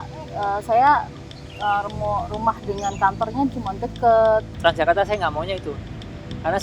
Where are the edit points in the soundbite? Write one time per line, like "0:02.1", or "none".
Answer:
0:04.5